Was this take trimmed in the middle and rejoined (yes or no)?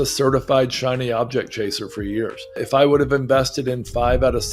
yes